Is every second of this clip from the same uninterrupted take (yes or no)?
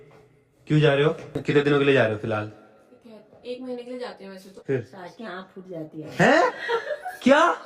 no